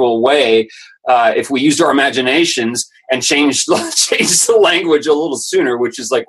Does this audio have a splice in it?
no; 0 cuts

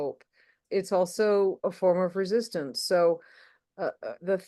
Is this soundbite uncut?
yes; 0 cuts

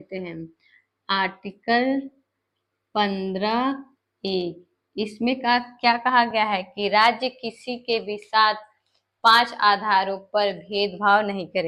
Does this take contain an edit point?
no; 0 cuts

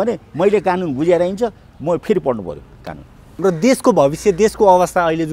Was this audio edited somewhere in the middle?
yes; 1 cut; at 3.3 s

